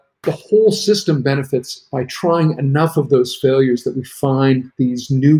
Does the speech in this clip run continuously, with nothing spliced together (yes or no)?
yes